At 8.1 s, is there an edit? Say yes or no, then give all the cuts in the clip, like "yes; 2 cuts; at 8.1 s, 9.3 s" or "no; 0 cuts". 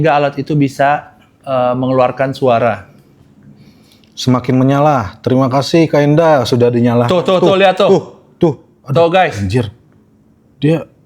no; 0 cuts